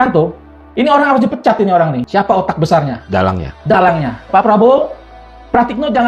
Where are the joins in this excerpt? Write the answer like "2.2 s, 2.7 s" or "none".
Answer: 2.0 s, 4.2 s